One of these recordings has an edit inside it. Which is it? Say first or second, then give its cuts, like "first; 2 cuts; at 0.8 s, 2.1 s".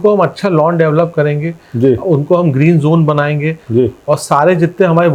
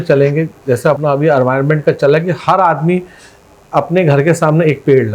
second; 1 cut; at 1.0 s